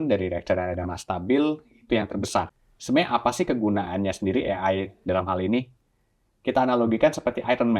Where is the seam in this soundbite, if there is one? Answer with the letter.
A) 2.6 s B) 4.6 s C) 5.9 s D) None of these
A